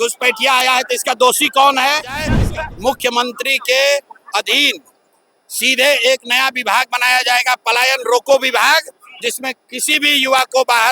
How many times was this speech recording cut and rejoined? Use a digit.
1